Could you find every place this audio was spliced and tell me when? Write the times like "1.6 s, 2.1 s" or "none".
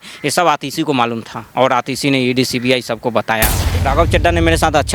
3.7 s